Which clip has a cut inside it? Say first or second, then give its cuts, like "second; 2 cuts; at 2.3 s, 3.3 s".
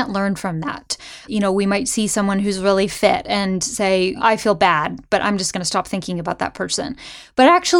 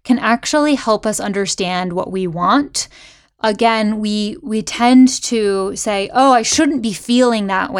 first; 2 cuts; at 1.3 s, 4.2 s